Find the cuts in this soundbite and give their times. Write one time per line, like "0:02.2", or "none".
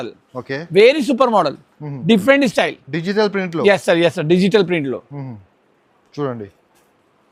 none